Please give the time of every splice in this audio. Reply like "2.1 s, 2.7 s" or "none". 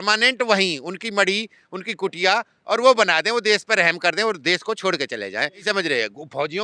5.6 s